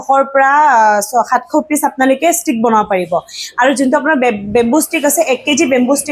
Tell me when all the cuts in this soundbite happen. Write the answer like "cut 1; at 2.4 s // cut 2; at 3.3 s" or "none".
none